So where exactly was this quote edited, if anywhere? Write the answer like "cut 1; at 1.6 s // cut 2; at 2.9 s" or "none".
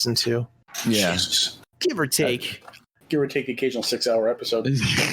cut 1; at 2.9 s